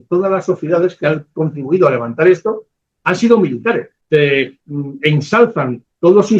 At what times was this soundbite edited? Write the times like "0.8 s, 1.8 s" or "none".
3.9 s